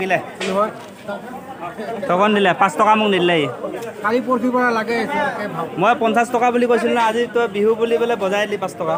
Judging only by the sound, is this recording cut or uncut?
uncut